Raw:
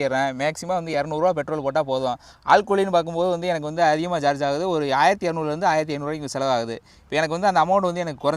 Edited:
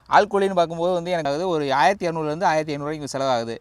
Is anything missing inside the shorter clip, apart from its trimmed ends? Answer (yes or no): yes